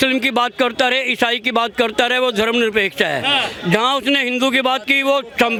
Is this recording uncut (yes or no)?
yes